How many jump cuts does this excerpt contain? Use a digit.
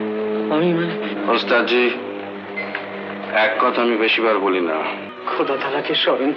1